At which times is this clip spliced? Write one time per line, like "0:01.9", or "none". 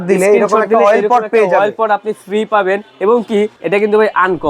0:03.6